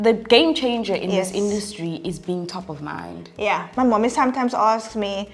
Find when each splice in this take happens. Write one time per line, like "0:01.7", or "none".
0:03.7

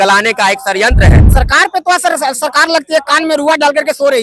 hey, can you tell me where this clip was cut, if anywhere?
0:01.2

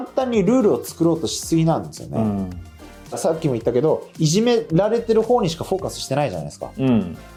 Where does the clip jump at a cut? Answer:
none

